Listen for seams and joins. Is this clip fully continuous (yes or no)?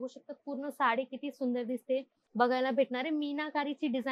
no